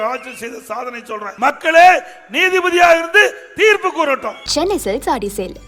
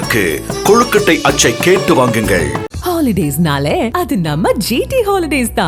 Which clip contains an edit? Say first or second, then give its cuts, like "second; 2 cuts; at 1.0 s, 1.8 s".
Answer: first; 2 cuts; at 1.3 s, 4.4 s